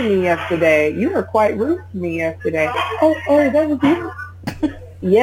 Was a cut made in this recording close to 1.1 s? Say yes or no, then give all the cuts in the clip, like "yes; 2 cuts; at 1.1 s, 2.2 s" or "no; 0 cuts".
no; 1 cut; at 2.7 s